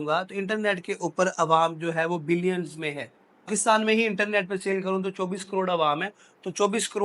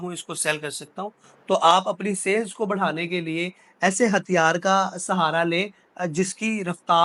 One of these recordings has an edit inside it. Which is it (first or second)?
first